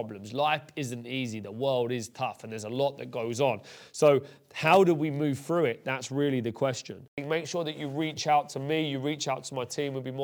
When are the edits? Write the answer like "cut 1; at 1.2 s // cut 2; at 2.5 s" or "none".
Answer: cut 1; at 7.2 s